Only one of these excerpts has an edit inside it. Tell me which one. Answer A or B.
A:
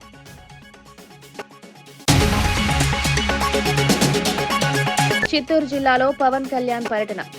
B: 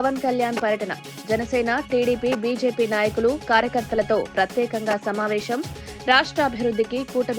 A